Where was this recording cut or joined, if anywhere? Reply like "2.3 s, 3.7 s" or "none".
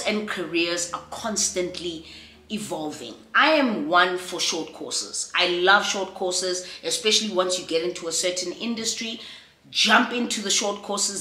none